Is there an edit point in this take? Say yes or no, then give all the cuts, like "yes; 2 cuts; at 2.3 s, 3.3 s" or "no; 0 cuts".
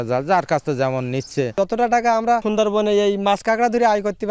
yes; 2 cuts; at 1.5 s, 2.4 s